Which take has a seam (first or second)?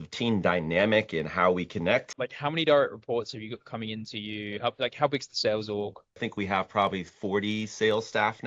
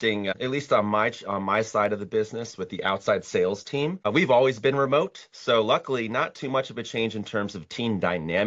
first